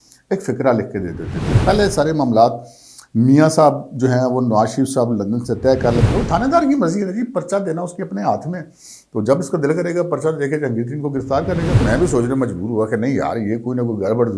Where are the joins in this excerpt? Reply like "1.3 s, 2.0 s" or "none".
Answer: 1.6 s, 6.1 s, 11.8 s